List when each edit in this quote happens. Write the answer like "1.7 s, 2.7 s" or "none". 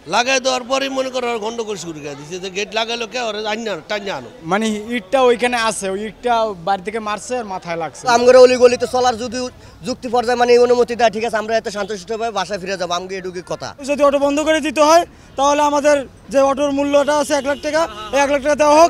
4.3 s, 8.1 s, 13.9 s